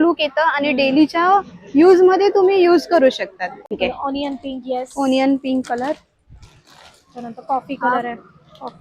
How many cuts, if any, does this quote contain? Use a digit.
1